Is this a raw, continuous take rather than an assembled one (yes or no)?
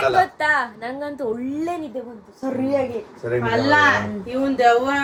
yes